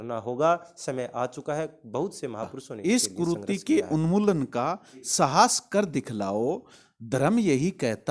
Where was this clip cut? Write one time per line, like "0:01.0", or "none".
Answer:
0:02.6

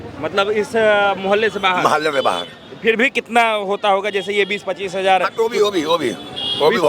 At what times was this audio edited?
none

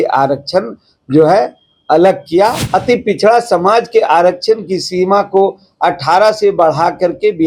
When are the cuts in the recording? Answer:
0:02.6

